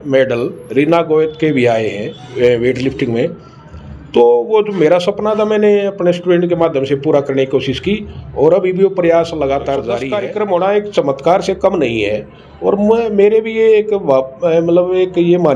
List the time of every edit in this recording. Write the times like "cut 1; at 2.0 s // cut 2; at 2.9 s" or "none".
cut 1; at 10.0 s